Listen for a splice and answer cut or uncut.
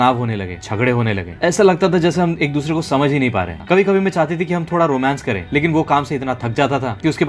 uncut